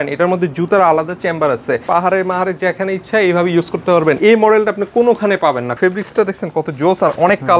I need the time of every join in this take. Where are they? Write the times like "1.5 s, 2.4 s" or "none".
1.9 s, 4.2 s, 5.8 s